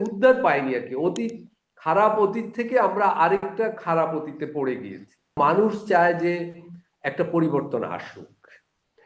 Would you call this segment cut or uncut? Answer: cut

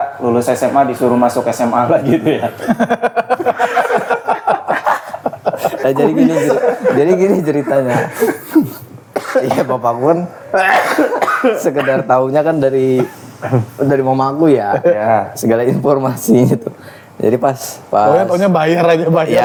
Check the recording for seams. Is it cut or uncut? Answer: uncut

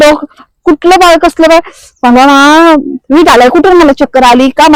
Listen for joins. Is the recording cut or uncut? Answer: uncut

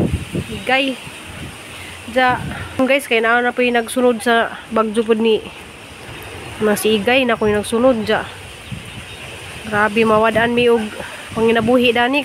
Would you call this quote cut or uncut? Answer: cut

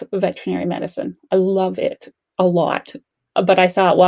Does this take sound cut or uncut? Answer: uncut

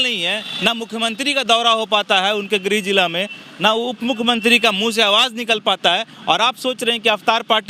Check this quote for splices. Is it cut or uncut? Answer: uncut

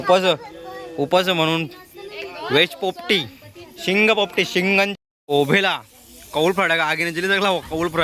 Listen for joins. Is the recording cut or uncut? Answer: cut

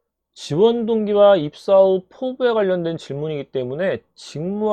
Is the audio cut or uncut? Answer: uncut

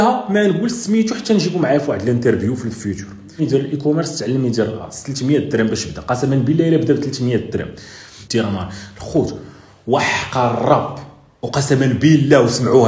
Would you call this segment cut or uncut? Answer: cut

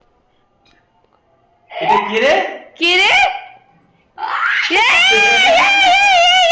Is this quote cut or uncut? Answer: uncut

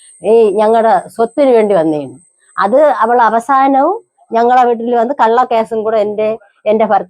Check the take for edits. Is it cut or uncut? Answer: uncut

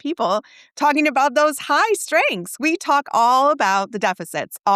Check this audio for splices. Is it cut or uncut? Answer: uncut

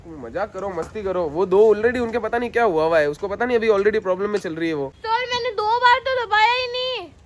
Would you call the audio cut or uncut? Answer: cut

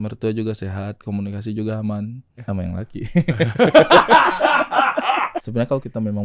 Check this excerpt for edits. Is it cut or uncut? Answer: cut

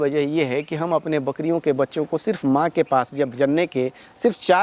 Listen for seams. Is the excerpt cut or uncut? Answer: uncut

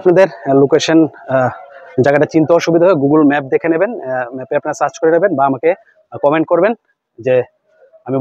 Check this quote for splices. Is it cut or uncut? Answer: uncut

